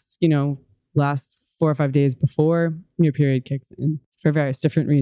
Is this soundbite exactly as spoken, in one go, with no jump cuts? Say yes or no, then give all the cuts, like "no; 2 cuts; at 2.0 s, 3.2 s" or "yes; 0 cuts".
no; 1 cut; at 4.1 s